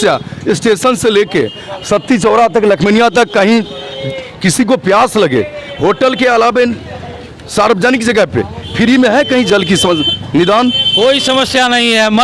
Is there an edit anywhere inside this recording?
no; 0 cuts

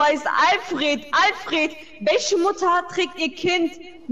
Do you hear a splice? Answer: no; 0 cuts

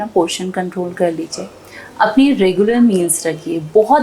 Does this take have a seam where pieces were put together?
no; 0 cuts

